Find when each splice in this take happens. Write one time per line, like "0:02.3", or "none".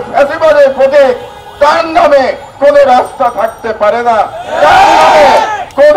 none